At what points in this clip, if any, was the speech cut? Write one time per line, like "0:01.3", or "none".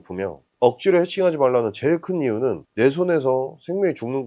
0:02.6